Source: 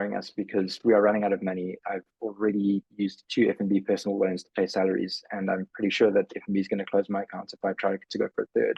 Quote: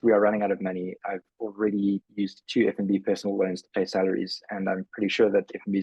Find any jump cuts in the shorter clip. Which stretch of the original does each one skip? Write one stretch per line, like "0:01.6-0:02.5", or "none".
none

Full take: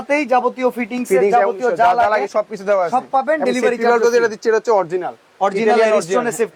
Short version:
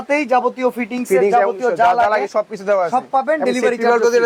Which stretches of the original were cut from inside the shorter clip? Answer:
none

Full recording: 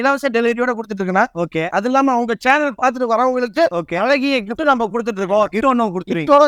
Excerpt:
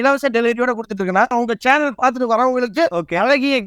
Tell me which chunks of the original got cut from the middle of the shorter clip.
0:01.3-0:02.1

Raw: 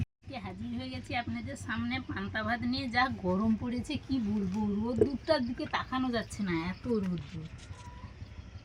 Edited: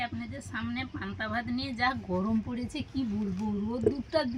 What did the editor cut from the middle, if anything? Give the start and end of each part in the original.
none

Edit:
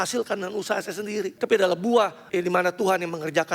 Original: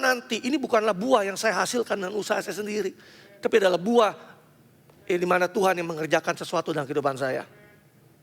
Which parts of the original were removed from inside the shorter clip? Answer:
0:02.9-0:03.3
0:04.2-0:05.0

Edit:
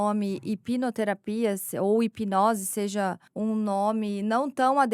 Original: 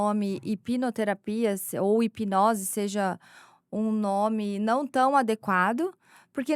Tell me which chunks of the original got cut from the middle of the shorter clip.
0:03.2-0:03.6

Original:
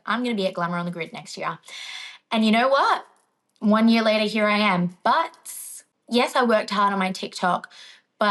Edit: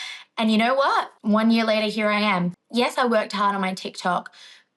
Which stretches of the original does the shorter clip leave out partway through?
0:03.1-0:03.5
0:04.9-0:05.9

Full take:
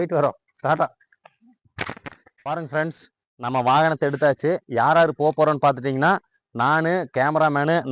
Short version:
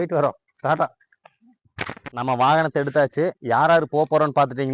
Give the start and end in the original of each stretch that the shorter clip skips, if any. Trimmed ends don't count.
0:02.0-0:03.3

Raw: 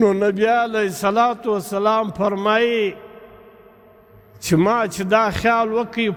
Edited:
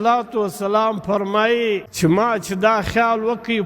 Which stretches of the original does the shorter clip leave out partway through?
0:03.0-0:04.4

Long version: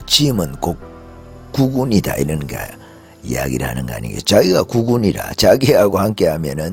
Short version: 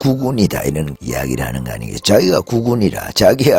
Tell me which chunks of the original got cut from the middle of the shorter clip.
0:02.5-0:03.2

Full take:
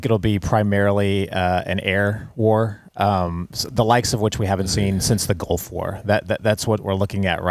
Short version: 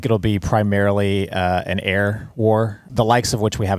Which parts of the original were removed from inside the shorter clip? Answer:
0:02.8-0:03.6

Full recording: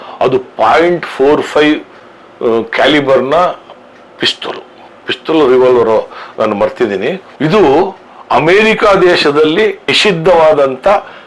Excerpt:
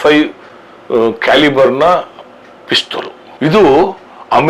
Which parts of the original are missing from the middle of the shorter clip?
0:04.8-0:07.3

